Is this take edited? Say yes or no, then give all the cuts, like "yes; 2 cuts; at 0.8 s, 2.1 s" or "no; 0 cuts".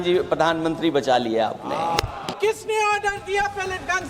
yes; 1 cut; at 2.2 s